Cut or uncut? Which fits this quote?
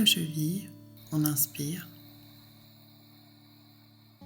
cut